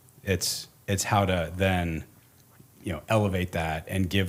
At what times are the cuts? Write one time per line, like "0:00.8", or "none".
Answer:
none